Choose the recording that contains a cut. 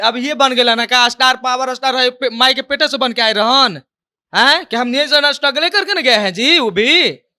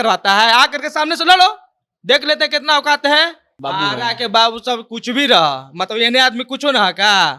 second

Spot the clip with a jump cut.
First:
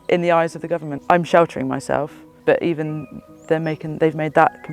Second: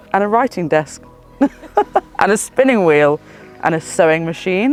first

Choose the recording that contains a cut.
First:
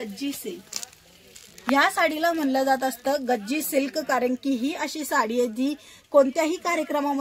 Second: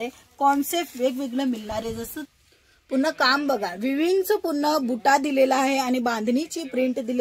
second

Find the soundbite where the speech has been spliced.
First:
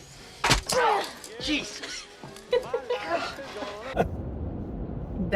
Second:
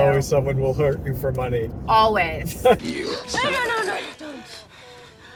first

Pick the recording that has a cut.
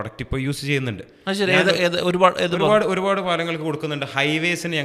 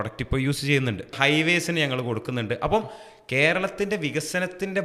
second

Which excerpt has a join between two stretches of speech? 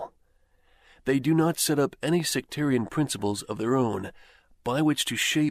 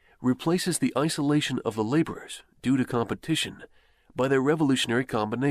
second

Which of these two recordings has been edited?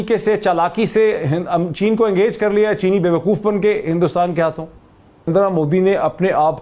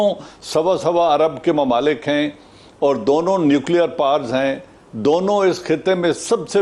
first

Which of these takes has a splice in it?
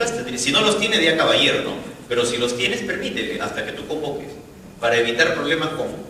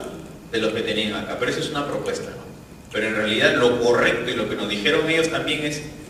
first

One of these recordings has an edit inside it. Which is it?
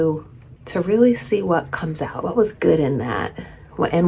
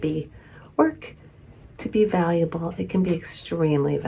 first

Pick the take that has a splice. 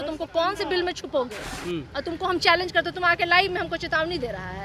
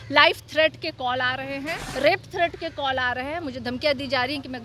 first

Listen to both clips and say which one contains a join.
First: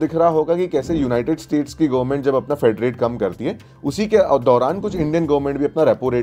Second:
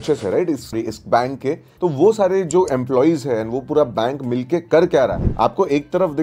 second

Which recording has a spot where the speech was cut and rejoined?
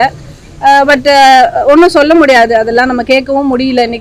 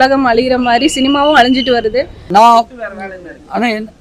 second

